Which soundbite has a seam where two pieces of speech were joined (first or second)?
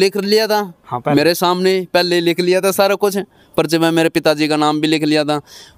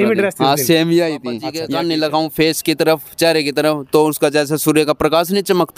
second